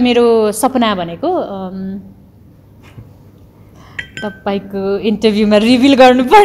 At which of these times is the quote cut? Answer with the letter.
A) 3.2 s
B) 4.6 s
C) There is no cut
C